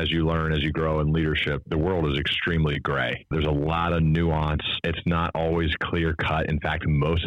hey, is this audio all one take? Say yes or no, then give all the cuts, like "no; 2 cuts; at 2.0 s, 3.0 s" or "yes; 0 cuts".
no; 3 cuts; at 1.7 s, 3.3 s, 4.8 s